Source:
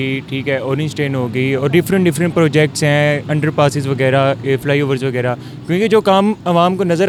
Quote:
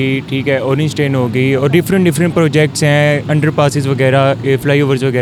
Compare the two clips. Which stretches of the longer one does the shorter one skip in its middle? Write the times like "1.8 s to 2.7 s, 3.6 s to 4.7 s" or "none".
none